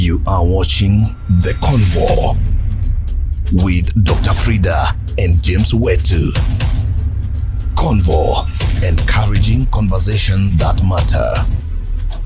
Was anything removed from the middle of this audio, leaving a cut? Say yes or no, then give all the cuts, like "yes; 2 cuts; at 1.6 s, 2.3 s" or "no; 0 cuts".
no; 0 cuts